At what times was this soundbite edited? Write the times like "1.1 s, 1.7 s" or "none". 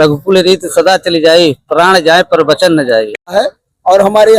3.3 s